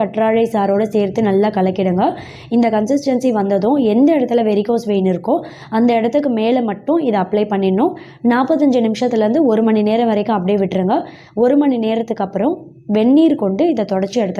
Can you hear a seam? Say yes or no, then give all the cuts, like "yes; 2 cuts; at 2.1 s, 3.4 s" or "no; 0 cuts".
no; 0 cuts